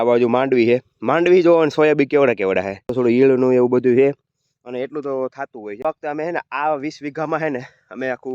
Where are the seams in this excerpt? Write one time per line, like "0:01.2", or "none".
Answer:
0:02.9
0:05.8